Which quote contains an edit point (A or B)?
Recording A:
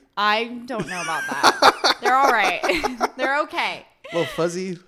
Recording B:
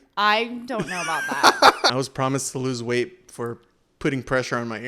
B